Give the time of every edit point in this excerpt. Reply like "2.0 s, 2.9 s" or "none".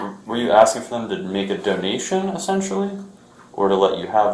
none